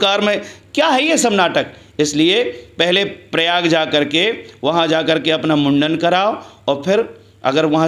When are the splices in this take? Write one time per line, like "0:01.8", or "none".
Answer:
none